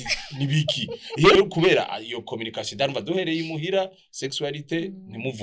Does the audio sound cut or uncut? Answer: cut